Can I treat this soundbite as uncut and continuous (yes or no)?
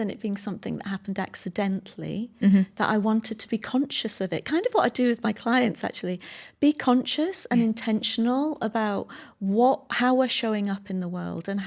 yes